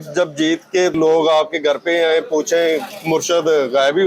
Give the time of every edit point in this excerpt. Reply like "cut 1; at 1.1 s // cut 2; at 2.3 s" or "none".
cut 1; at 0.9 s // cut 2; at 2.9 s